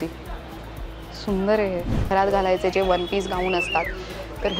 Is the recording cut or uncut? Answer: cut